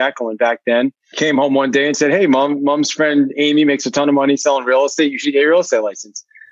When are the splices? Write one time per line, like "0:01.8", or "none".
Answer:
0:01.0